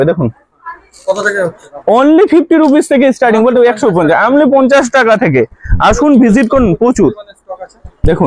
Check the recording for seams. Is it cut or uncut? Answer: uncut